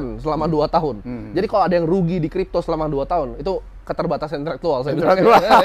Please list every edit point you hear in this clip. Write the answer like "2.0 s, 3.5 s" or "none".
none